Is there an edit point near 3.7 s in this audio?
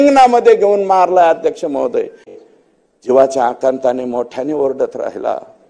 no; 1 cut; at 2.4 s

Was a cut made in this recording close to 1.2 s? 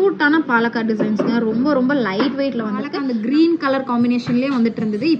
no; 1 cut; at 3.0 s

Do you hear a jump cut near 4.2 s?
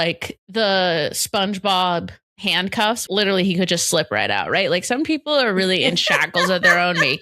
no; 1 cut; at 3.0 s

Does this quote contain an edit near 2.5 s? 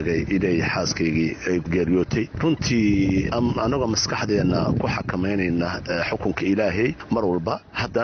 no; 0 cuts

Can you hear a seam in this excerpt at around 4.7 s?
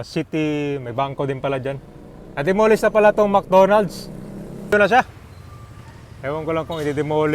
yes; 1 cut; at 4.7 s

